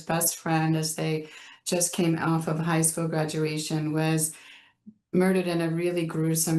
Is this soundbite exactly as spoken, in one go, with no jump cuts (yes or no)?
yes